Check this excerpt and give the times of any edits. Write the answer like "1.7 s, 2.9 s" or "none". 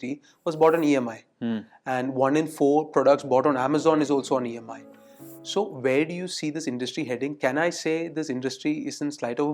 none